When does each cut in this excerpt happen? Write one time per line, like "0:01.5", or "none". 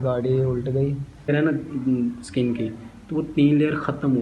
0:01.3